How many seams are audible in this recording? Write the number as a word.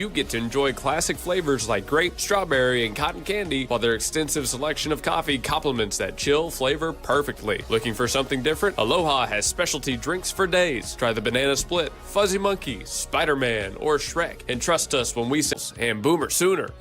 one